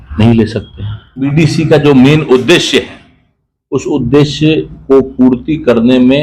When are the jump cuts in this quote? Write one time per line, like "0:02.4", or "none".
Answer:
0:01.2